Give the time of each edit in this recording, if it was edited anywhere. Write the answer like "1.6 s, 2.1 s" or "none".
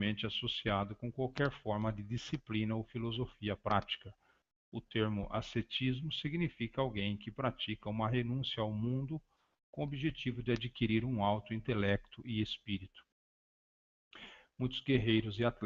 none